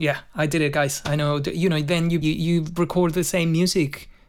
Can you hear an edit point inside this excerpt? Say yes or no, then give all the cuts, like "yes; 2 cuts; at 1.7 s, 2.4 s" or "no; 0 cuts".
yes; 1 cut; at 2.2 s